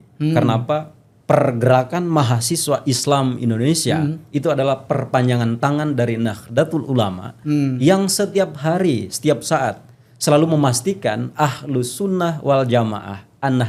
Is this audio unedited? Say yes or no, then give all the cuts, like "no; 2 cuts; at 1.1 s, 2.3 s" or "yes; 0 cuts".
yes; 0 cuts